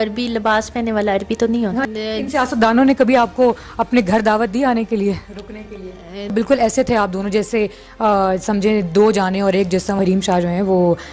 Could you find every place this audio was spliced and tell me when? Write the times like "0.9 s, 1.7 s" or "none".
1.8 s, 6.3 s, 10.0 s